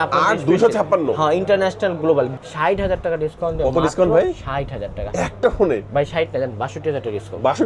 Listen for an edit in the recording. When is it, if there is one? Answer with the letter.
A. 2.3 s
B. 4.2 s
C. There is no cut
A